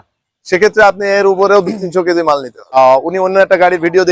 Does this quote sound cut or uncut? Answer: cut